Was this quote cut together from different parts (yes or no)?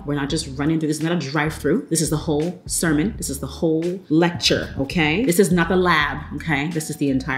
no